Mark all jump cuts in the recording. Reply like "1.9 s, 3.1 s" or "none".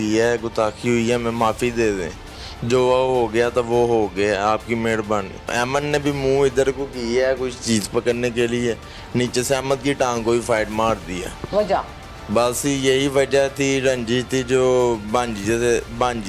5.5 s, 11.3 s